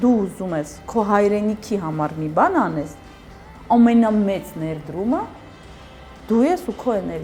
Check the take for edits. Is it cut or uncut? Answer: uncut